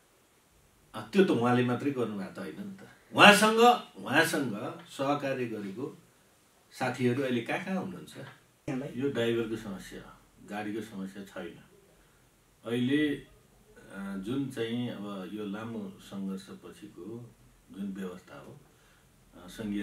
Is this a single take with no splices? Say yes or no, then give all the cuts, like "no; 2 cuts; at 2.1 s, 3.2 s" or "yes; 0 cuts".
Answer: no; 1 cut; at 8.7 s